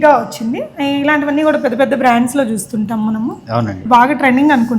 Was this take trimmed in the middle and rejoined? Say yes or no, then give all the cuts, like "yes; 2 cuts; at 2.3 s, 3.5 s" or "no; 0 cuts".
yes; 1 cut; at 3.8 s